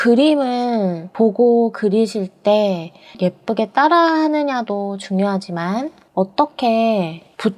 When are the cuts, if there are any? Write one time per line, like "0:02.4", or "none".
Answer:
0:01.1
0:03.1
0:06.0